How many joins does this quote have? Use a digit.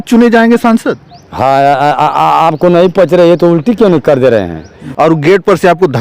1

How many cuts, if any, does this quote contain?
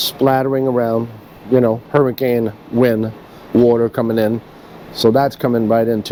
0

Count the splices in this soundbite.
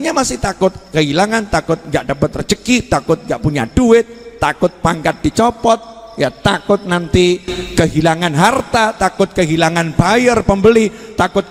0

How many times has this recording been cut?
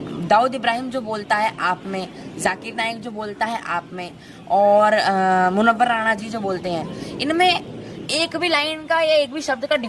0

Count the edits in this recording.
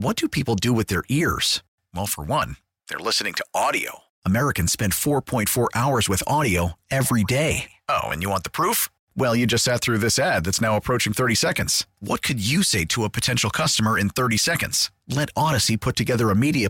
0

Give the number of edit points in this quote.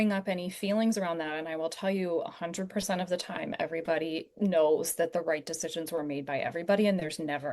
0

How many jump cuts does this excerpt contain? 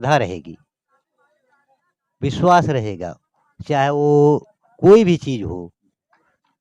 0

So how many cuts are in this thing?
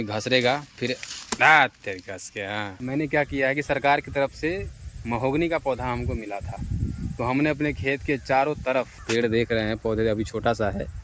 2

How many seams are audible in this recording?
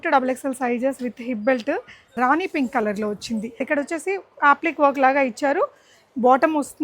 2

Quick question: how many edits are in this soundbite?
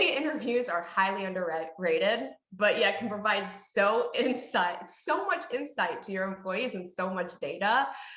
0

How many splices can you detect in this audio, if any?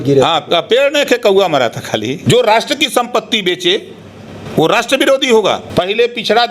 2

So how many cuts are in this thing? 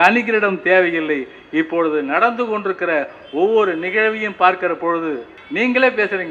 1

